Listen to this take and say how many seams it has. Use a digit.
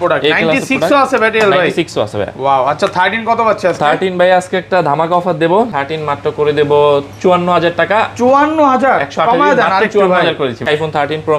2